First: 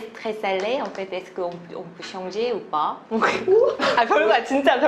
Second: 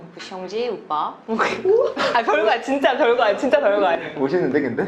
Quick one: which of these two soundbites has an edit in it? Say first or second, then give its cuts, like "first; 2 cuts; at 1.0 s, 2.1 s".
second; 1 cut; at 4.0 s